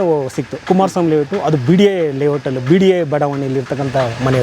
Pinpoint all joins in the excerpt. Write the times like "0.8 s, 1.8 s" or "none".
none